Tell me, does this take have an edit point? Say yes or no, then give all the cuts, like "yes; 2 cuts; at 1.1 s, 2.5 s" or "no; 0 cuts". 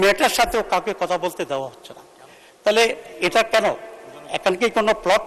no; 0 cuts